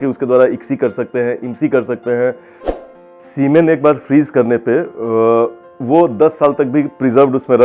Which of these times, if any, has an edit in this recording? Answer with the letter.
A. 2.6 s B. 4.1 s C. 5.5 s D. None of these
A